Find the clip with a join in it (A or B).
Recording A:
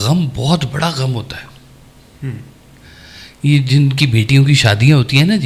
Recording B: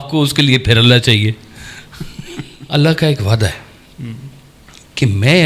B